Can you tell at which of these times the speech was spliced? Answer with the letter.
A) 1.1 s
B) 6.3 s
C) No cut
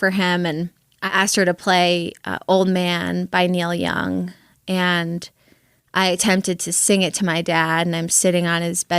A